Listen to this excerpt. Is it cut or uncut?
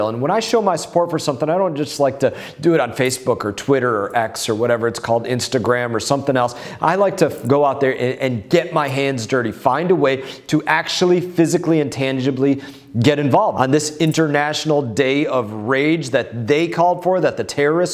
cut